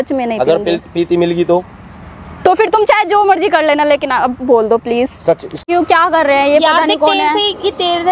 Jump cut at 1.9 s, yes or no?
no